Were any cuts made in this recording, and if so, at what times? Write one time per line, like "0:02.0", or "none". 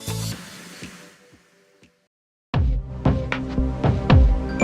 0:01.9

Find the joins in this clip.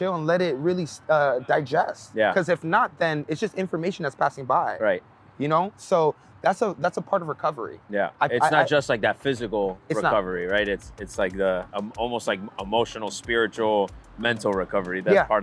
none

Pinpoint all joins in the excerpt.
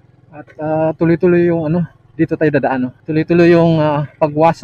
0:03.0

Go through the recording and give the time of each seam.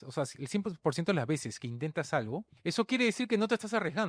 0:02.5

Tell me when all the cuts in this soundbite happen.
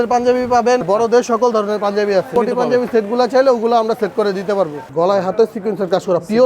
0:00.8
0:02.3
0:04.8

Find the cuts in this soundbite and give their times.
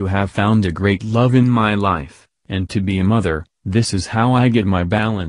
none

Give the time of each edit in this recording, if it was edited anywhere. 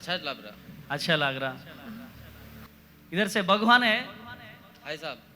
0:02.8

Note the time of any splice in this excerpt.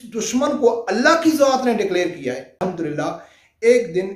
0:02.6

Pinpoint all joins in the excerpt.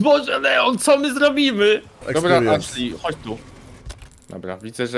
0:02.1

